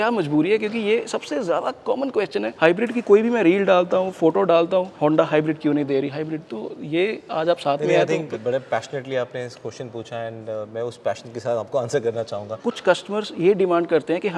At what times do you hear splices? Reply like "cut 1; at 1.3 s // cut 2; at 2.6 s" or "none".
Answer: cut 1; at 12.6 s